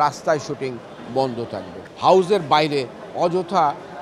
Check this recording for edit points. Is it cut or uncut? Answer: cut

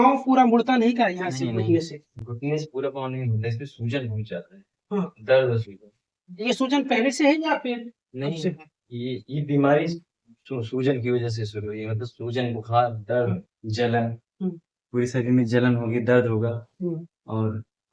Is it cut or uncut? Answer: uncut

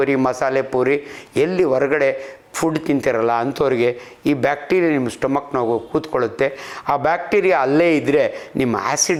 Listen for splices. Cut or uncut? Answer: uncut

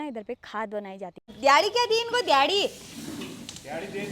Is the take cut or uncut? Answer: cut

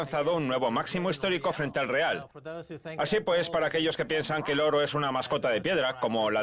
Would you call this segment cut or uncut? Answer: cut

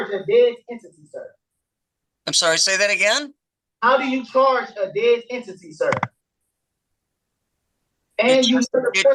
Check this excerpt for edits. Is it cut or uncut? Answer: uncut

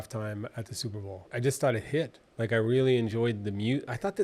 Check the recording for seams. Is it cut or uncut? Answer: uncut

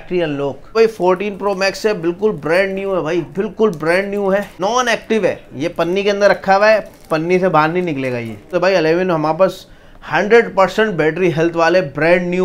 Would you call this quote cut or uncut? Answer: cut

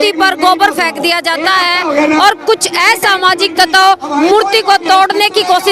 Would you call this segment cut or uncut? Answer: uncut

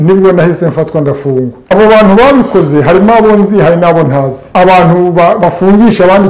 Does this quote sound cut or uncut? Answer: cut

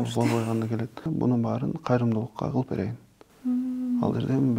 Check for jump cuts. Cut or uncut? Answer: cut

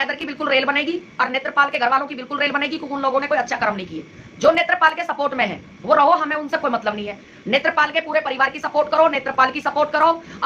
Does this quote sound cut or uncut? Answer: uncut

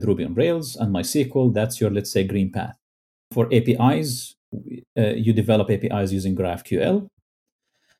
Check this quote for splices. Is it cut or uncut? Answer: cut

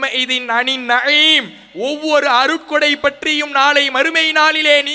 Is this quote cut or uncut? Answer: uncut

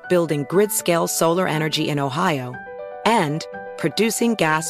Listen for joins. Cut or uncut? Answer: uncut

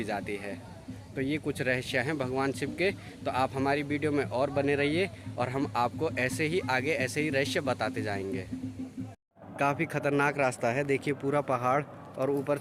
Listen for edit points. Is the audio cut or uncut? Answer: cut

